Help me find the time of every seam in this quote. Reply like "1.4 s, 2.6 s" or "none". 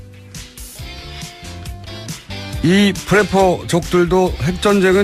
1.8 s